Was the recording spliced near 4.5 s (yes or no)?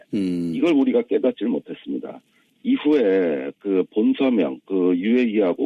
yes